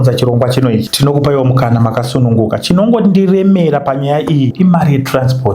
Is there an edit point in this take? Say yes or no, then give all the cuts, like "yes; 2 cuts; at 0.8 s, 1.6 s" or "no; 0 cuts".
yes; 2 cuts; at 0.9 s, 4.5 s